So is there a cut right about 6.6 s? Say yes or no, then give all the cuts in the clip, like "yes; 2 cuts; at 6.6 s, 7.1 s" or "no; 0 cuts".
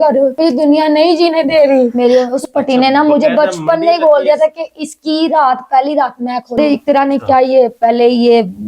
yes; 2 cuts; at 1.9 s, 6.6 s